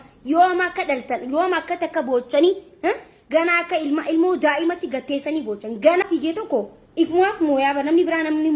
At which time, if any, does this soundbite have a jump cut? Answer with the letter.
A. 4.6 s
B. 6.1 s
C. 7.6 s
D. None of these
B